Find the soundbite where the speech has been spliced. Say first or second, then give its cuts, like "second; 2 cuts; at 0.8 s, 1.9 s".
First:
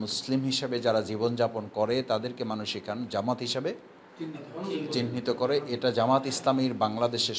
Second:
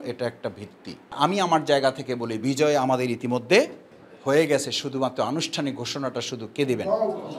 second; 1 cut; at 1.1 s